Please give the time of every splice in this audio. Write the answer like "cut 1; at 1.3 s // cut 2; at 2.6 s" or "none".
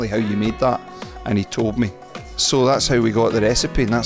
cut 1; at 2.3 s